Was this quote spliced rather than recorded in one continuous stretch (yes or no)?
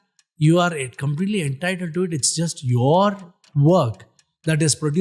no